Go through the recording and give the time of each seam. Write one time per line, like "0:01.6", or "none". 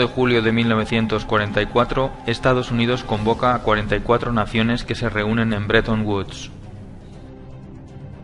0:04.9

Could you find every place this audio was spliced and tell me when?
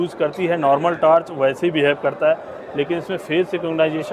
none

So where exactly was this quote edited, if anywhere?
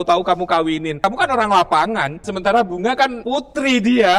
0:00.9
0:02.2
0:03.2

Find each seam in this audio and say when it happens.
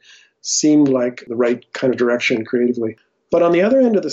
0:01.2

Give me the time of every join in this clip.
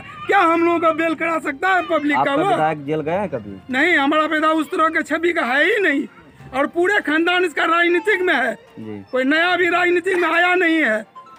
none

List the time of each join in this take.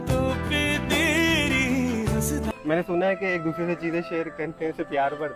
0:02.5

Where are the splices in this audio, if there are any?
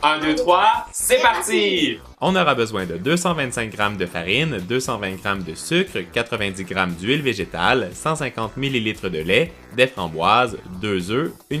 none

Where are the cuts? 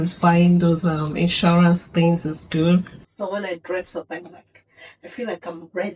0:02.9

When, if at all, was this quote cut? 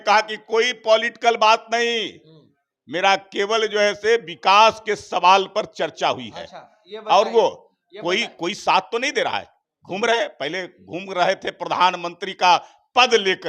none

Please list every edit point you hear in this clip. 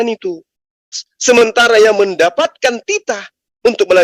0:01.0

